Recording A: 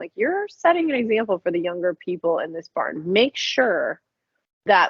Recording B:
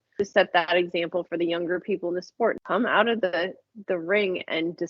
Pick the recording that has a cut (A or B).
B